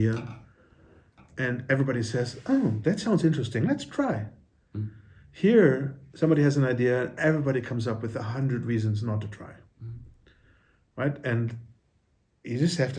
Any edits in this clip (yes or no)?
no